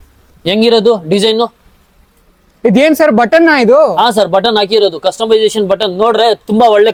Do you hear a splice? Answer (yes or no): no